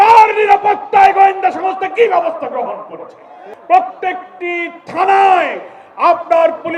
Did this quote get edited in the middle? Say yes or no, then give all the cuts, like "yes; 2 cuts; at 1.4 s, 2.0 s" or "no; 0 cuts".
yes; 1 cut; at 3.5 s